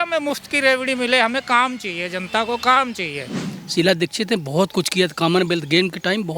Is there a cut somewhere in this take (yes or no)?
yes